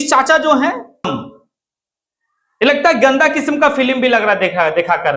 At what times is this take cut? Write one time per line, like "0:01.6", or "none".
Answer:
0:01.2